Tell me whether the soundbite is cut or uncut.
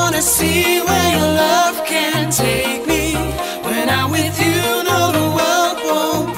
uncut